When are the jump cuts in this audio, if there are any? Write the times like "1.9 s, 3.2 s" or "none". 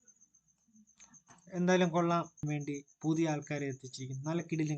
2.5 s